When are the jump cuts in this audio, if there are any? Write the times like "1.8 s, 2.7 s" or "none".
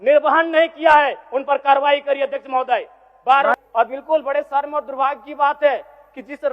3.6 s